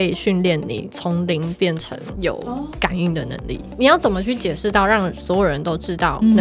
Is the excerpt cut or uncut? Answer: cut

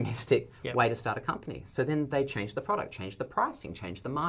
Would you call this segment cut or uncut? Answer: uncut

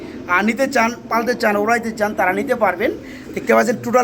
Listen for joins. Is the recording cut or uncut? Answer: uncut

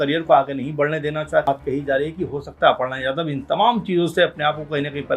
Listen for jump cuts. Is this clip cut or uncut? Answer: cut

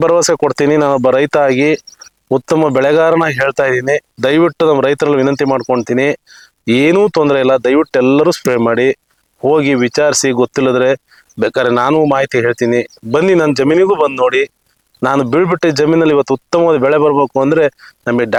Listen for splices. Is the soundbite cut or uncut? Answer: uncut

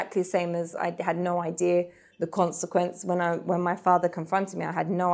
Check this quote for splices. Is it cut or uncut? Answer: uncut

